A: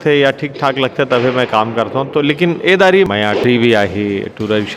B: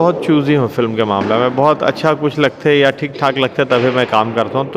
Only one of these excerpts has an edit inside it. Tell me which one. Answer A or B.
A